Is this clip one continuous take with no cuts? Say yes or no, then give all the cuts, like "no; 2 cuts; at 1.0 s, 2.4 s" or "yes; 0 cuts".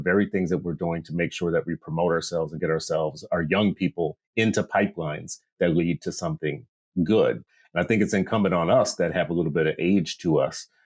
yes; 0 cuts